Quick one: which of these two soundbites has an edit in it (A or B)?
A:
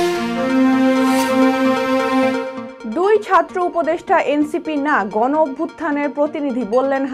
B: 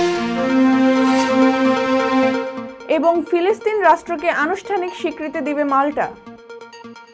A